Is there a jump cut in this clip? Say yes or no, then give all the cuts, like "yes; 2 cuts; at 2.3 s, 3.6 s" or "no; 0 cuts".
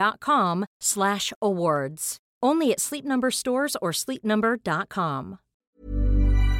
yes; 1 cut; at 5.6 s